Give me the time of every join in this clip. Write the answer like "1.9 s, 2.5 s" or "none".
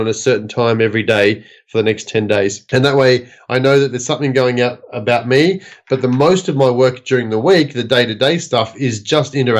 2.6 s